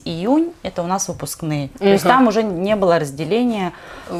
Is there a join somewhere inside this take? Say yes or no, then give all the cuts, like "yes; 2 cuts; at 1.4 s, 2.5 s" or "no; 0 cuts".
no; 0 cuts